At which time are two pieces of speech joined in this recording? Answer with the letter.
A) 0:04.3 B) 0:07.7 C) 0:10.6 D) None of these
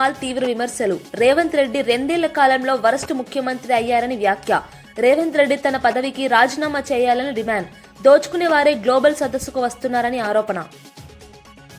C